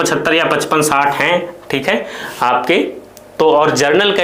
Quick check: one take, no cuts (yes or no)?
yes